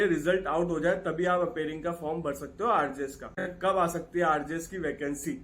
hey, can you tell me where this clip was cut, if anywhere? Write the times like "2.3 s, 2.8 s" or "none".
3.5 s